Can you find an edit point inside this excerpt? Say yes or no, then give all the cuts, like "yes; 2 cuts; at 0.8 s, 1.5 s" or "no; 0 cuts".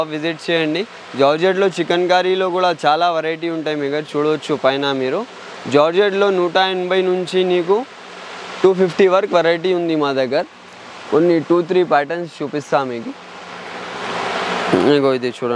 no; 0 cuts